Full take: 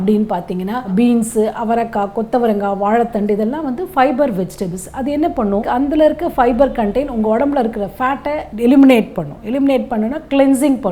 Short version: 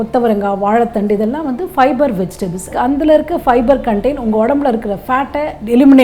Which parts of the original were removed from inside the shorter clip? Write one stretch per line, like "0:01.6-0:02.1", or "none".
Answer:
0:04.9-0:05.6